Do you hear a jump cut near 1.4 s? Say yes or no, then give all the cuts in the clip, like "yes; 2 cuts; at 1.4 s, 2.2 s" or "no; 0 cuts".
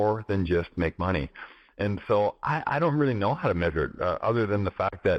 no; 0 cuts